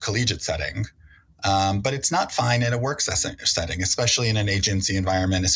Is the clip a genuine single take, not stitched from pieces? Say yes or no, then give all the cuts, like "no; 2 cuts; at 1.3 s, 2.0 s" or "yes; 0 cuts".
yes; 0 cuts